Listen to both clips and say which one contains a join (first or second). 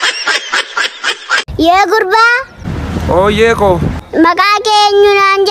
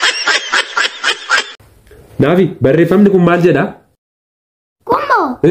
first